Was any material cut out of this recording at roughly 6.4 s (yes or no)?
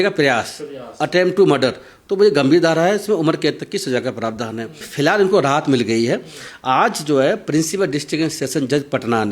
no